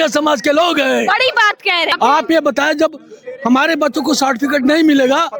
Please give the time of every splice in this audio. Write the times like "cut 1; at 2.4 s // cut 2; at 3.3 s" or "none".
cut 1; at 1.9 s